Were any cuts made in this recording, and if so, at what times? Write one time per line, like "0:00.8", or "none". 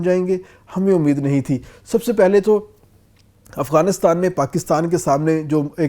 none